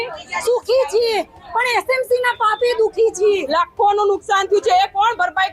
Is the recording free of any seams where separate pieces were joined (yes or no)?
no